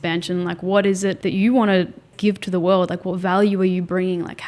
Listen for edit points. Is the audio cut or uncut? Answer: cut